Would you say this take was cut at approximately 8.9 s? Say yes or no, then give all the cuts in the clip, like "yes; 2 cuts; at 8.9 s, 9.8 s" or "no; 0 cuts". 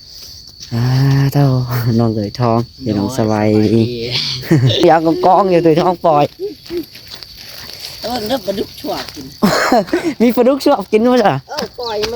no; 1 cut; at 4.8 s